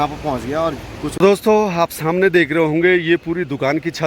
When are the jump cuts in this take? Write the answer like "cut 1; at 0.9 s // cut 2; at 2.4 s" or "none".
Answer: cut 1; at 1.1 s